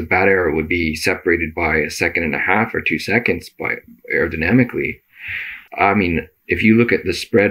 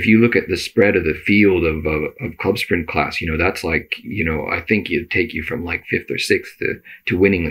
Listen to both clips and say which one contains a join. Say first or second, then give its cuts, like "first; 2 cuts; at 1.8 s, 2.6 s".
first; 1 cut; at 5.6 s